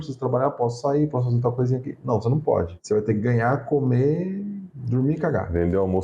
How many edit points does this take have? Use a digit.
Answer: 0